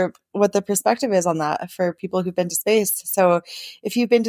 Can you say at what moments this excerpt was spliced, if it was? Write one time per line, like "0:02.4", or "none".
none